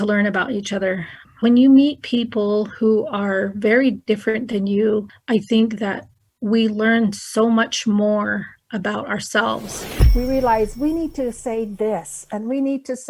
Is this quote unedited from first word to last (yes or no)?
no